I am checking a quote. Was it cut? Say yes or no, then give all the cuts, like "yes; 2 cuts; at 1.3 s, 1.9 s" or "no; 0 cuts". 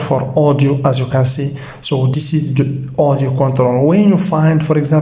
no; 0 cuts